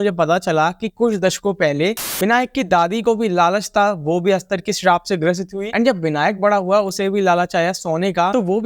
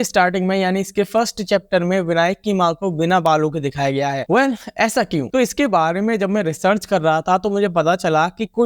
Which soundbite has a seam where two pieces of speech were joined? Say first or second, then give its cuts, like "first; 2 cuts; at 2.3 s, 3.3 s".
first; 1 cut; at 2.0 s